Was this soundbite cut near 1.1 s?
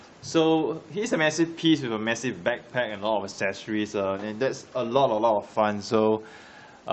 yes; 1 cut; at 1.1 s

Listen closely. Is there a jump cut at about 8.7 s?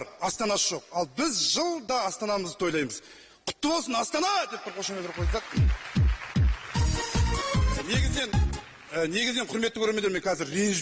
no; 0 cuts

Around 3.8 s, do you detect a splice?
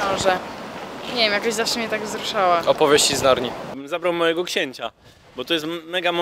yes; 1 cut; at 3.8 s

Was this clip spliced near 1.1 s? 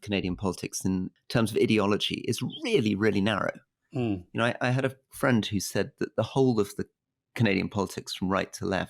yes; 1 cut; at 1.1 s

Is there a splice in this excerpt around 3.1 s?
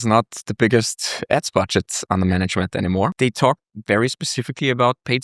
yes; 1 cut; at 3.1 s

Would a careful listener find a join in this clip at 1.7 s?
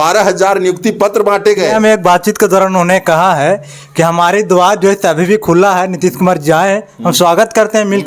yes; 1 cut; at 1.7 s

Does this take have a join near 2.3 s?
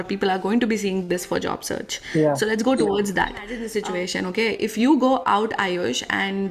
no; 1 cut; at 3.6 s

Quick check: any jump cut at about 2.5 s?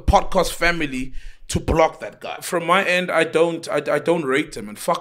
yes; 1 cut; at 2.5 s

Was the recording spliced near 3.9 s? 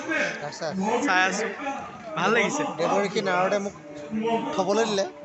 no; 0 cuts

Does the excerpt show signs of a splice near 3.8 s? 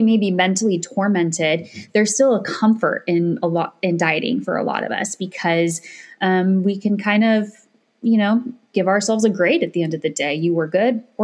no; 0 cuts

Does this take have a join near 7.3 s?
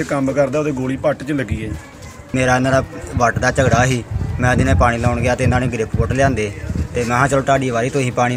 no; 1 cut; at 2.3 s

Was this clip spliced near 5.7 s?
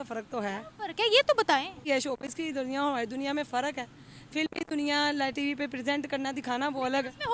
no; 1 cut; at 1.7 s

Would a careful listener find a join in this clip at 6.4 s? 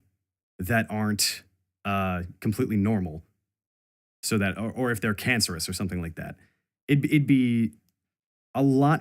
no; 1 cut; at 3.3 s

